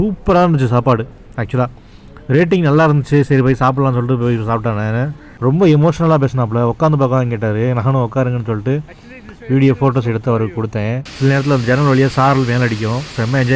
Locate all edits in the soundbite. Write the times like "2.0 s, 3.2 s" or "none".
5.2 s, 11.0 s

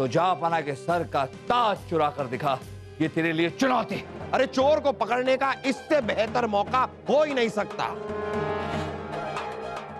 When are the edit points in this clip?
2.8 s, 4.1 s

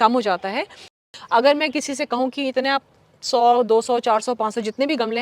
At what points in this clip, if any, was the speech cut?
1.0 s

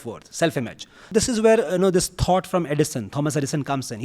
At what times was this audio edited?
1.1 s

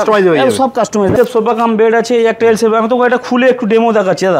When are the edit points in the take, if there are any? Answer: 1.1 s

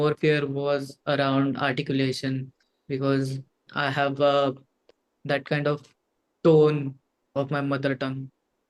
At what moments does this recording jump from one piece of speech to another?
3.7 s

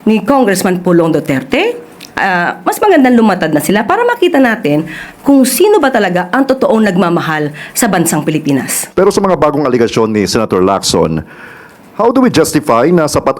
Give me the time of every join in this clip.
8.8 s

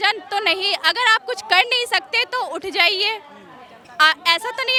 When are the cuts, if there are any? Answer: none

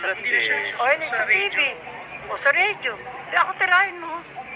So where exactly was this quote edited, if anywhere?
none

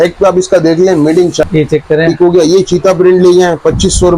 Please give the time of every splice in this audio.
1.4 s

